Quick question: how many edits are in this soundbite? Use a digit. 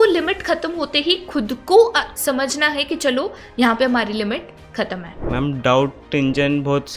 1